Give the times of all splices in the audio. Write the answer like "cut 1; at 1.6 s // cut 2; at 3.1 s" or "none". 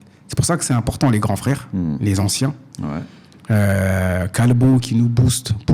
none